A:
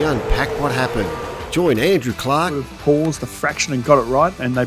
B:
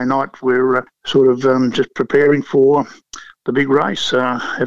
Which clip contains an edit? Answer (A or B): B